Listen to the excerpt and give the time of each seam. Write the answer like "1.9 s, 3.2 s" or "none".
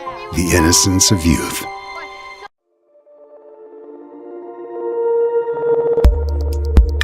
2.3 s

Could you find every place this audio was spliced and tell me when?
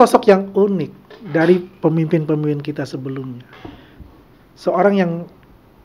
none

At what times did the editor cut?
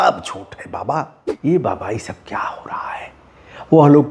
1.2 s

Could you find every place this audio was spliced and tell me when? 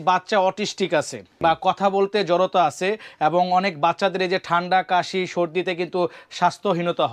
1.2 s

